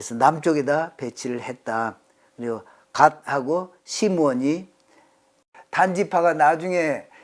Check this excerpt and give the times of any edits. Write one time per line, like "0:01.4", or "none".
0:05.6